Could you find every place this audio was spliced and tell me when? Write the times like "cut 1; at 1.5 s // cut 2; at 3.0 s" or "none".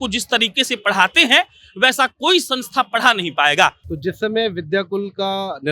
cut 1; at 3.9 s

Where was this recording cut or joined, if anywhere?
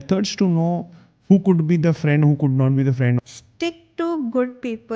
cut 1; at 3.2 s

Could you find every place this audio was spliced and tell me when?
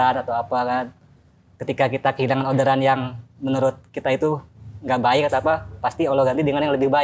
none

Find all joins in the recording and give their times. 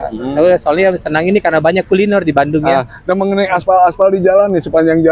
none

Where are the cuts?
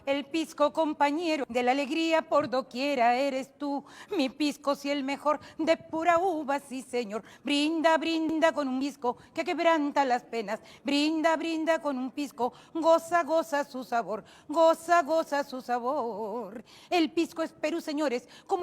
cut 1; at 1.4 s

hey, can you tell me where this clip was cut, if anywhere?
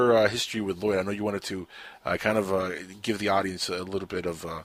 none

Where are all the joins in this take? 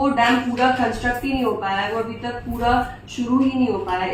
none

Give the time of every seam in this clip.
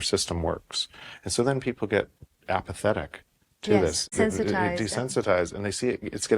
cut 1; at 4.1 s

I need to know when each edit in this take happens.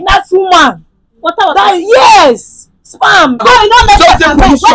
cut 1; at 3.4 s

